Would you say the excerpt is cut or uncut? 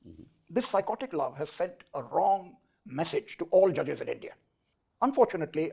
uncut